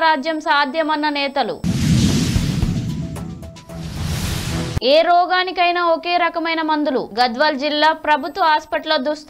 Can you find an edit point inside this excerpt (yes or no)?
no